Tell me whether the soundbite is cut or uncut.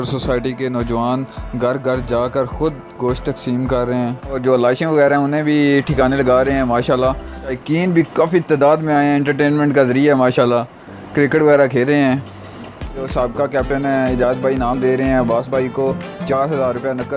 cut